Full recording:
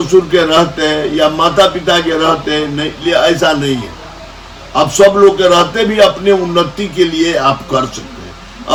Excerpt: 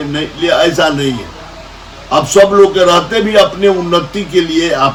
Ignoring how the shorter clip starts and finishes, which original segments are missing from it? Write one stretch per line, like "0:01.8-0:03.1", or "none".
none